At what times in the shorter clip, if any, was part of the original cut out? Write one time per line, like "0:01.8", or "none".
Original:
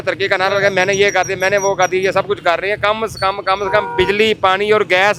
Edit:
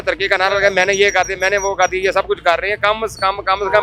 none